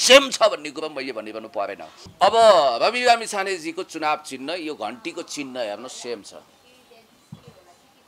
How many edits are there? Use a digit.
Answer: 1